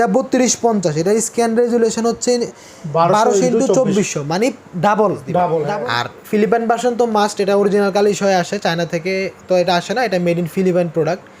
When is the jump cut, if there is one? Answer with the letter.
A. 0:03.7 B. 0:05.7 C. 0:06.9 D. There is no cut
B